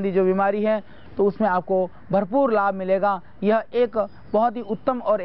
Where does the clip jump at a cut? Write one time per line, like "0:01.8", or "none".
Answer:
0:01.0

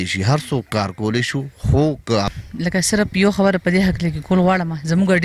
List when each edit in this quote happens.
0:02.4

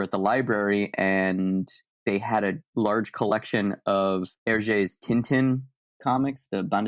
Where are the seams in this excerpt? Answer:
0:02.1
0:04.3

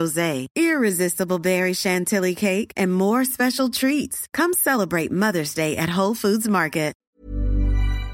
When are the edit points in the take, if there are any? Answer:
0:07.0

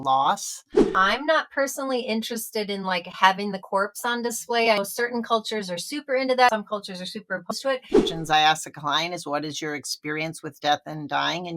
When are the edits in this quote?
0:00.9
0:06.5
0:08.1

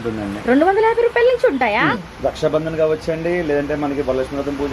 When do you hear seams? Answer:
0:02.0

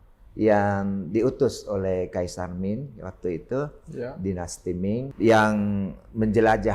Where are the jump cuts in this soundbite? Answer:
0:05.1

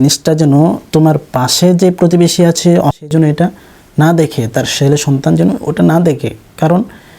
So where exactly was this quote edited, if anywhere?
0:03.0

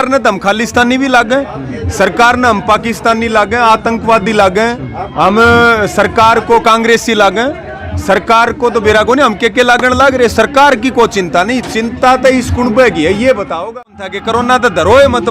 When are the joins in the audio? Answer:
0:14.1

